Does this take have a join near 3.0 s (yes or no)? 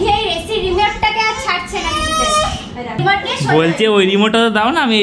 yes